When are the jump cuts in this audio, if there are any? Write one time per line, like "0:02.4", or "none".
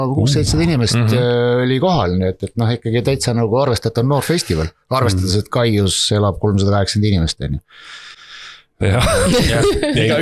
none

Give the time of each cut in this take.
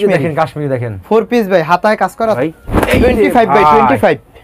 0:02.4

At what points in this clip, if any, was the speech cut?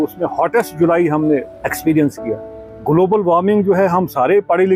none

